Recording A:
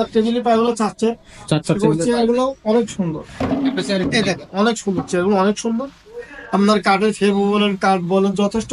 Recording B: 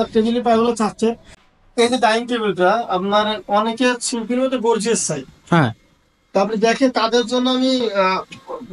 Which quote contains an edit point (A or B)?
B